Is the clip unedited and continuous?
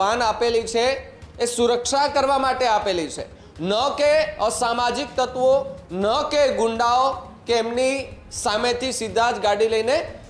yes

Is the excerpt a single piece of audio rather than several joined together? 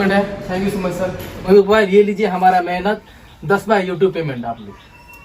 no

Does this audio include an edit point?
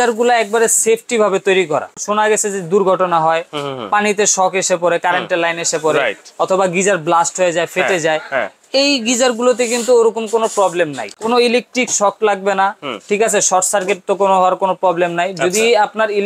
yes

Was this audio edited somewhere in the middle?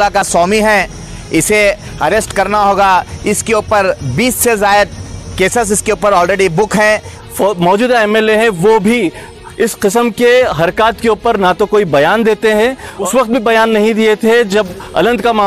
yes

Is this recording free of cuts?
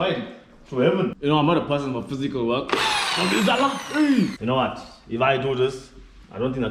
no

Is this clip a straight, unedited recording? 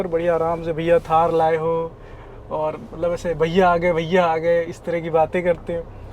yes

